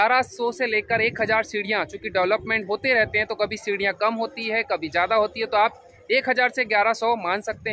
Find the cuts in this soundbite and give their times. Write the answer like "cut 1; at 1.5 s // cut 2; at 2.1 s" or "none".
none